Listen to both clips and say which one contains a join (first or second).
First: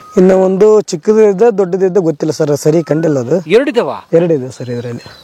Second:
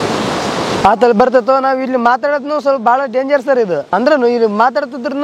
second